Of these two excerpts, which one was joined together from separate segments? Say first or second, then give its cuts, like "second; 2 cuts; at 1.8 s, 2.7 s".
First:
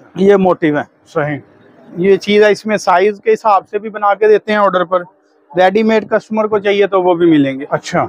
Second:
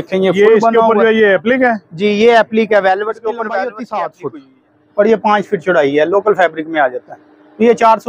second; 1 cut; at 3.8 s